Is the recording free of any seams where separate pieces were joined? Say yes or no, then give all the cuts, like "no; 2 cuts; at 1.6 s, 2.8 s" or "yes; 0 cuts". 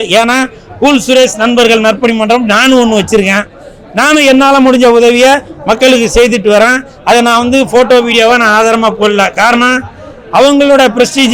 yes; 0 cuts